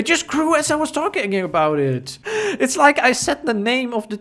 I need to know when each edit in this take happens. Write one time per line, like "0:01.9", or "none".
0:02.1